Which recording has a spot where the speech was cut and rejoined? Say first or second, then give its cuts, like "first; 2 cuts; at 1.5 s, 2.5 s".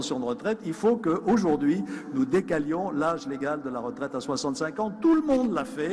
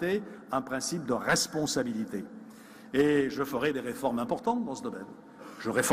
first; 1 cut; at 2.9 s